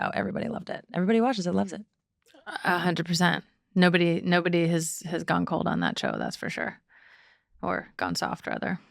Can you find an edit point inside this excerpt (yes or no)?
no